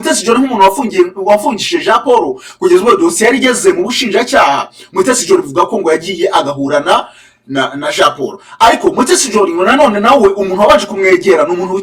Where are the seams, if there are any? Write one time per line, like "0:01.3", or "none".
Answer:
none